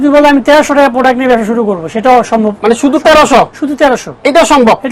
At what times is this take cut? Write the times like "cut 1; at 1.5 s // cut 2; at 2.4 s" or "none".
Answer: none